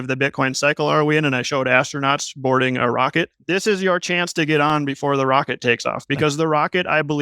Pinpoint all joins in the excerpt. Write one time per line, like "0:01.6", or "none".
0:03.4